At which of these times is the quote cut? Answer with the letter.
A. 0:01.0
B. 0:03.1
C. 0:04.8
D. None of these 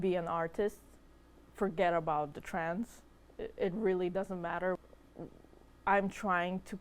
C